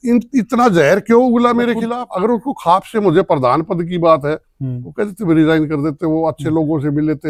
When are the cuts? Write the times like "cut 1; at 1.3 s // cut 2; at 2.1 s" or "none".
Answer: none